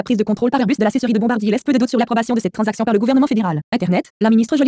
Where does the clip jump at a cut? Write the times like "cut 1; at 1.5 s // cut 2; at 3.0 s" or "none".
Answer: cut 1; at 3.6 s

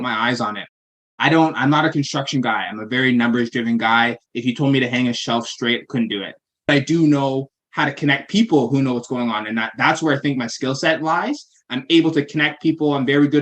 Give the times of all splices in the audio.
cut 1; at 6.7 s

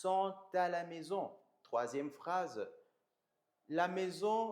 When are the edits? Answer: none

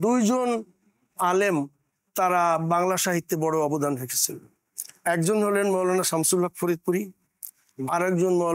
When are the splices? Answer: none

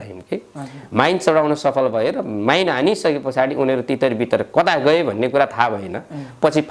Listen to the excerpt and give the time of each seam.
none

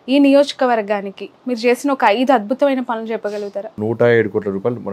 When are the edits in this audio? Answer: cut 1; at 3.8 s

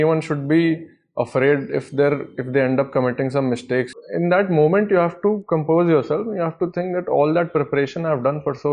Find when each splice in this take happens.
cut 1; at 4.0 s

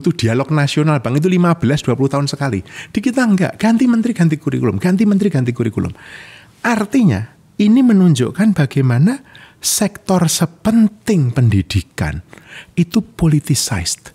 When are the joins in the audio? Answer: none

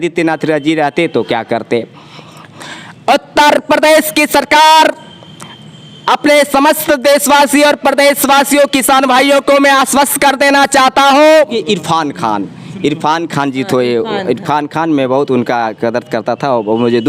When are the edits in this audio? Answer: cut 1; at 2.4 s // cut 2; at 11.4 s

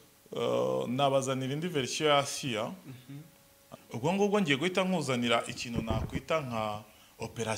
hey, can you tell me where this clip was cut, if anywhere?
cut 1; at 3.6 s

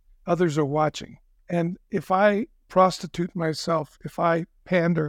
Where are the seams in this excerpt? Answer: cut 1; at 1.3 s // cut 2; at 2.6 s

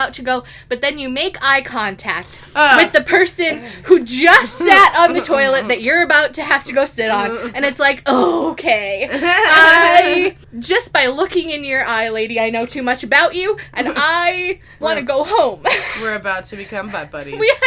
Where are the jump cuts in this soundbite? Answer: cut 1; at 10.5 s // cut 2; at 14.7 s

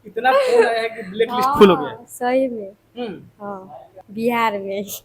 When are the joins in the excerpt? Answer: cut 1; at 3.9 s

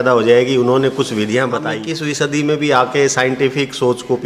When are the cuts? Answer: cut 1; at 1.8 s

